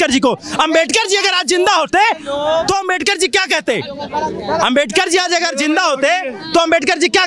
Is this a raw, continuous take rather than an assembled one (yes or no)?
yes